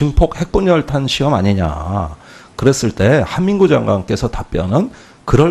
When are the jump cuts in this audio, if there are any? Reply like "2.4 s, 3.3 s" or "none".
none